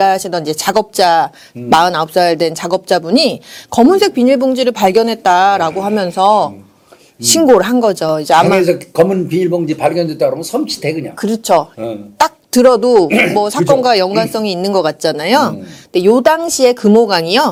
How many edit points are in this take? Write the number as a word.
zero